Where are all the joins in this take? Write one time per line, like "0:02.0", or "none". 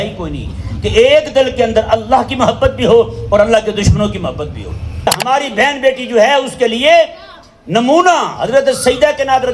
0:05.1